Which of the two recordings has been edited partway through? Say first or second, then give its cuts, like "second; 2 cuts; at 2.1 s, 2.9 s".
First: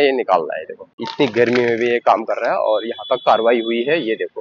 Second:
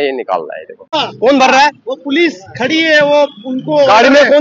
second; 1 cut; at 1.0 s